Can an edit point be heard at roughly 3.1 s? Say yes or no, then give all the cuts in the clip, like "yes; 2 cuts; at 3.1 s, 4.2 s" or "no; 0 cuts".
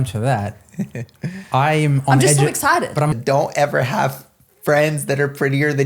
yes; 1 cut; at 3.1 s